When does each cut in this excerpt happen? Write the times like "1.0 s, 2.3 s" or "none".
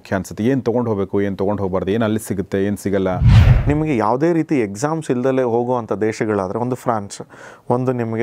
3.5 s